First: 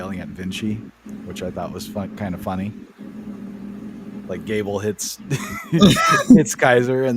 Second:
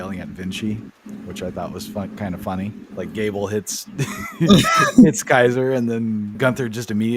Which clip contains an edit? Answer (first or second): second